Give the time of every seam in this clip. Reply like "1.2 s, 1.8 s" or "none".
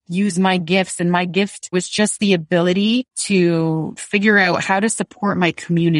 1.7 s, 3.2 s